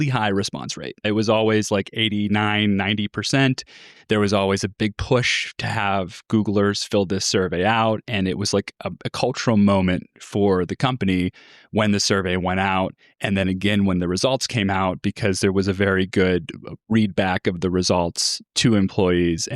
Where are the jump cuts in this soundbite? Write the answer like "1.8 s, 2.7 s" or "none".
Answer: 1.0 s, 4.7 s